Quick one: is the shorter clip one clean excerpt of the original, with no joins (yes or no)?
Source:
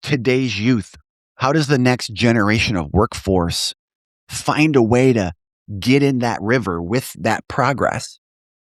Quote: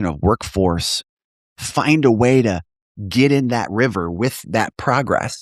yes